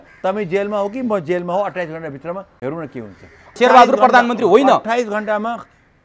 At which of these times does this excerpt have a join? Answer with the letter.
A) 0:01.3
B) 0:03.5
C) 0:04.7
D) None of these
B